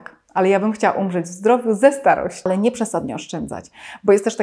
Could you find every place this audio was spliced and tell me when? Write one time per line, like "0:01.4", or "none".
0:02.5